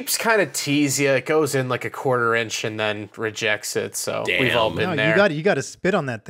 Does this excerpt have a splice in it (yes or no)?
no